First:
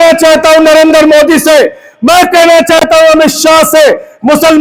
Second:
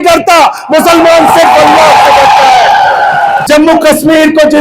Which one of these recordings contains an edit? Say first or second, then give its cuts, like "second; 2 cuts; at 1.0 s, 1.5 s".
second; 1 cut; at 3.4 s